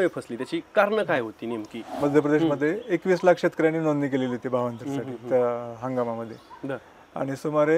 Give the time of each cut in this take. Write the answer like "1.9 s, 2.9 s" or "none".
1.9 s